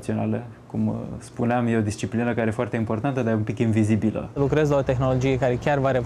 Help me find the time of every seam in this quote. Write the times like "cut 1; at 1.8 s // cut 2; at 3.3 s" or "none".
cut 1; at 4.3 s